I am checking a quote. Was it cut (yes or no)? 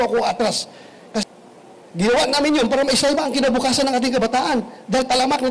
yes